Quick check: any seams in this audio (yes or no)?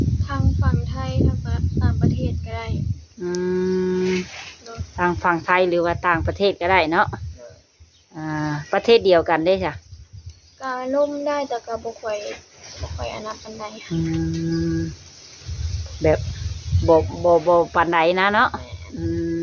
no